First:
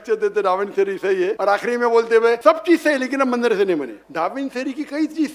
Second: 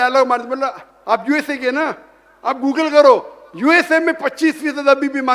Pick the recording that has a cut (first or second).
first